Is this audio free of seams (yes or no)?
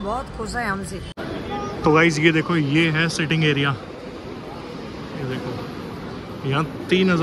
no